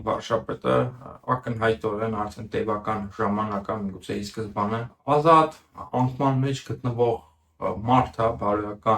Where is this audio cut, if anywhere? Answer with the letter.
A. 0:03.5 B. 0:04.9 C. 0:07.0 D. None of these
B